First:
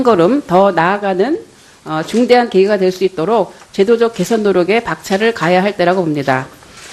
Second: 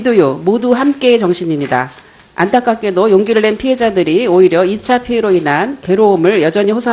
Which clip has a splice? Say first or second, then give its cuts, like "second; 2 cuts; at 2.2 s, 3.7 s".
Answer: first; 1 cut; at 3.0 s